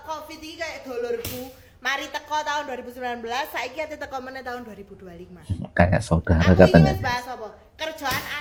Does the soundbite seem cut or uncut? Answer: uncut